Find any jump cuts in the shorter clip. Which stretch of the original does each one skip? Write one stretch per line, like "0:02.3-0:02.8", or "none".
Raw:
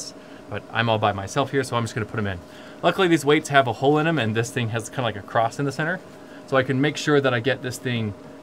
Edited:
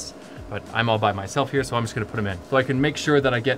0:02.4-0:06.4